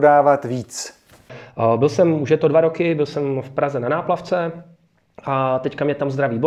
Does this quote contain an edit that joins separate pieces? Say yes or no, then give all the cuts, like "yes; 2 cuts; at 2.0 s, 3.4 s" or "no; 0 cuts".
yes; 1 cut; at 1.4 s